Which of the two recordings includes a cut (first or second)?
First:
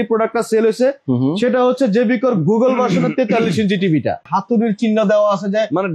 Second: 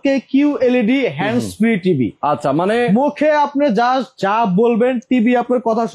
first